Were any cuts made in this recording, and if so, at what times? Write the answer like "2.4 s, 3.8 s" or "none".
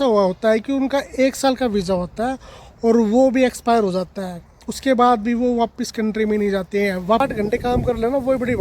7.2 s